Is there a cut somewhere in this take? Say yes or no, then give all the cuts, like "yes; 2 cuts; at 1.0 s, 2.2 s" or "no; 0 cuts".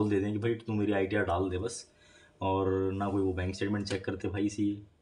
no; 0 cuts